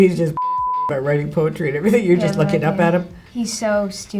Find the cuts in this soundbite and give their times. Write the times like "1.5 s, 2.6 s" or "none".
3.2 s